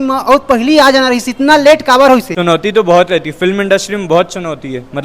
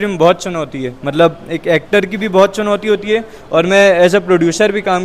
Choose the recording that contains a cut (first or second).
first